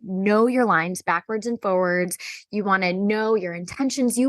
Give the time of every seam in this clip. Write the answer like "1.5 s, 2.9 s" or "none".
none